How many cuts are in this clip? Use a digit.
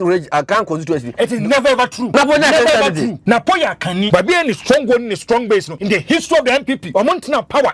5